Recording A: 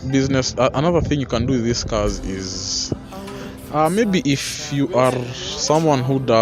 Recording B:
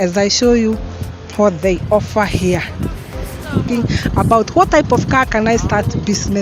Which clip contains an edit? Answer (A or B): B